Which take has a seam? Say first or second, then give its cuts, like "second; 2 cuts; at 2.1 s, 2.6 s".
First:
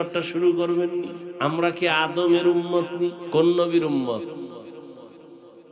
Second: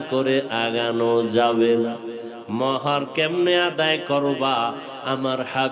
first; 2 cuts; at 1.2 s, 3.2 s